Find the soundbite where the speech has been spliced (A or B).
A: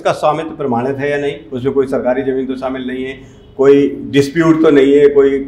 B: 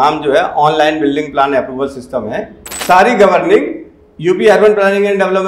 B